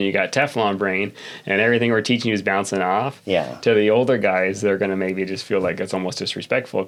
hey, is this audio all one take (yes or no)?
yes